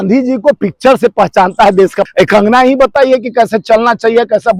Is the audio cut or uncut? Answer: cut